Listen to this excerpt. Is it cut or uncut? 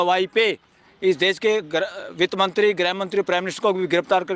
uncut